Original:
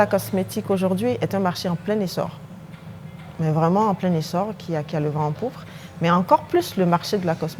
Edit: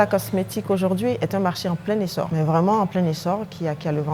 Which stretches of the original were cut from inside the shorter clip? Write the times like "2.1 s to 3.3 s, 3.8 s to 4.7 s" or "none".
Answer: 2.3 s to 3.4 s